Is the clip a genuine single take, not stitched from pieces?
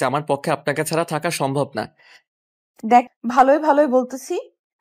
no; 1 cut; at 3.1 s

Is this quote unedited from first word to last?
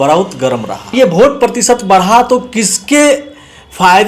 no; 1 cut; at 0.9 s

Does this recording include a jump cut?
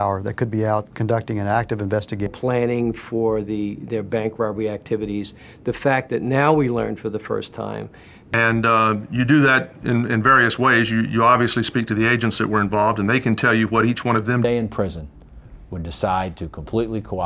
yes; 3 cuts; at 2.3 s, 8.2 s, 14.1 s

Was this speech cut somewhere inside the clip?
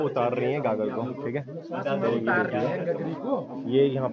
no; 0 cuts

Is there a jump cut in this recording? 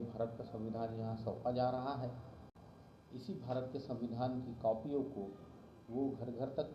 no; 0 cuts

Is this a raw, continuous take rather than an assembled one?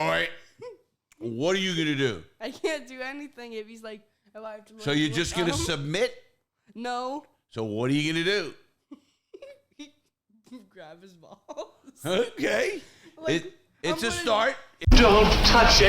no; 1 cut; at 14.8 s

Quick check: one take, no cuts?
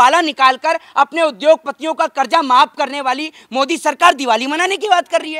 yes; 0 cuts

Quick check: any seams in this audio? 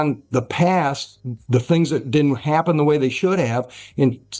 no; 0 cuts

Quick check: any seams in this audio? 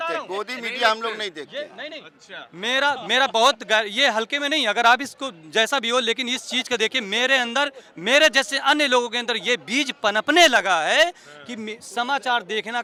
no; 0 cuts

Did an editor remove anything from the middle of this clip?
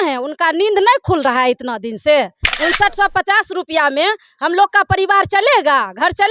yes; 1 cut; at 2.4 s

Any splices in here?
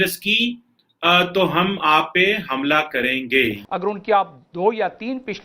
yes; 1 cut; at 3.6 s

